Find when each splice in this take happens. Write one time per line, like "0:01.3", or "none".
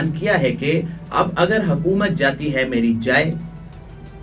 none